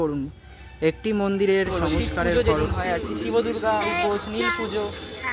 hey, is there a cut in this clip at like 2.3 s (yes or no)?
yes